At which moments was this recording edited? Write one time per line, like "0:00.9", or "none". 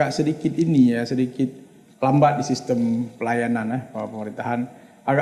none